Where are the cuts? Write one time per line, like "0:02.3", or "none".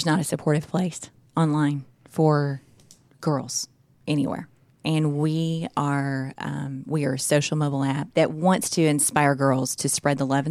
none